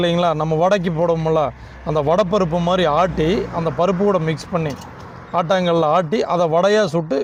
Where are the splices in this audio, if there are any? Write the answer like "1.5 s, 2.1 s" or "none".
none